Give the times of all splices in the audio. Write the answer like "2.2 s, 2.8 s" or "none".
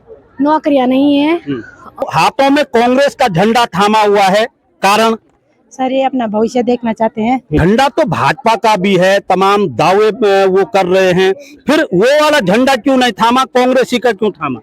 2.0 s, 7.6 s